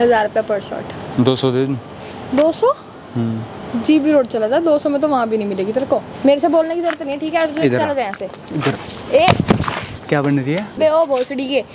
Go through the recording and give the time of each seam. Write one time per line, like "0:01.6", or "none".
0:01.0
0:06.1
0:10.8